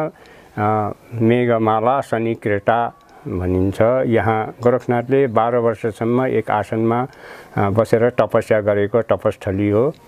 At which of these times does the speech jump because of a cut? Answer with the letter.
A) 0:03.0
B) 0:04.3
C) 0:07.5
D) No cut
D